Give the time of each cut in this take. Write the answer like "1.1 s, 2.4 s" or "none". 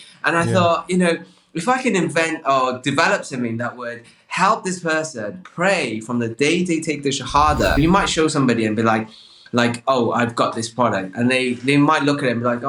7.8 s